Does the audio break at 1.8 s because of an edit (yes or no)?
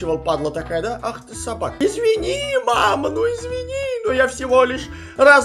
yes